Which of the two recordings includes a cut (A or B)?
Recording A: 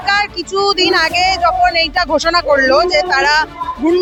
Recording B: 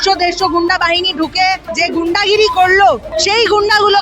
B